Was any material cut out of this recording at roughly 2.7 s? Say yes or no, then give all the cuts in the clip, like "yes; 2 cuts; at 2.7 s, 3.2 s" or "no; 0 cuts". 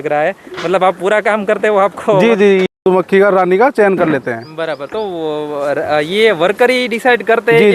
yes; 1 cut; at 2.7 s